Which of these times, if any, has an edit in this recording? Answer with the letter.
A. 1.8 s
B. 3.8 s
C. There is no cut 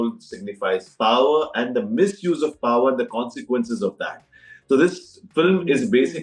C